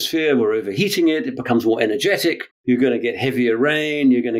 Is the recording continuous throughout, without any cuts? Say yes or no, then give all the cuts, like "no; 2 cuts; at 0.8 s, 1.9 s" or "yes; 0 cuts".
yes; 0 cuts